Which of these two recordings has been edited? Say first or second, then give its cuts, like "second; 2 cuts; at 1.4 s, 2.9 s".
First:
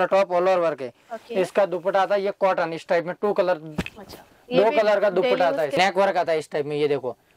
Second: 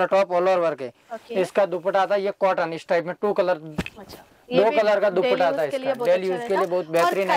first; 1 cut; at 5.7 s